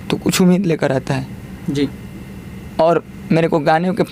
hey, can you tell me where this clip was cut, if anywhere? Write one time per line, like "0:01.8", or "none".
none